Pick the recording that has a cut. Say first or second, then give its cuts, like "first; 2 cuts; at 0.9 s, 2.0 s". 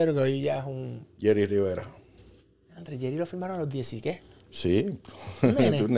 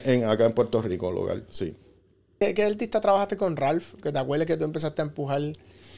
second; 1 cut; at 2.3 s